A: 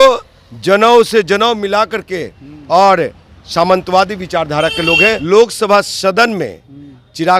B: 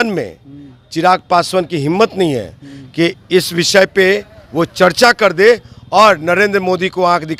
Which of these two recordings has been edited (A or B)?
A